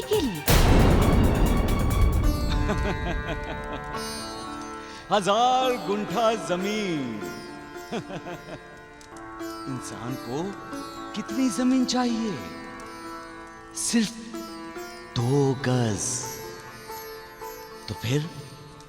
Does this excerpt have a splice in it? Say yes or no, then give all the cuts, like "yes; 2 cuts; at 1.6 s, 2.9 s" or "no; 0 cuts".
no; 0 cuts